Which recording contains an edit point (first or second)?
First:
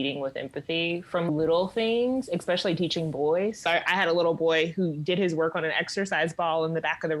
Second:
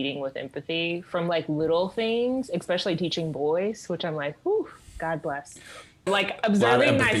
first